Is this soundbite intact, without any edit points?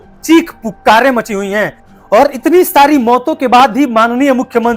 yes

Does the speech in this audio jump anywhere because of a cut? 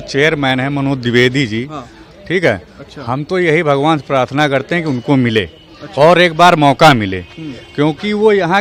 no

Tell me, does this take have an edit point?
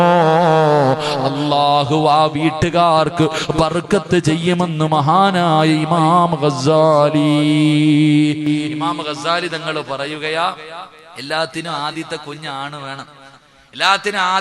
no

